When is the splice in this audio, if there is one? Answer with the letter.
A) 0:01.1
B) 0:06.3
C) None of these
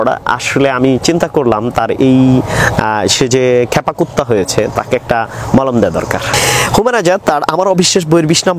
B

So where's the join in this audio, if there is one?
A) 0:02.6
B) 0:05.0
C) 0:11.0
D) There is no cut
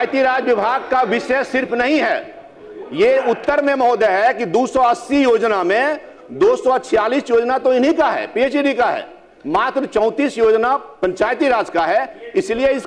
D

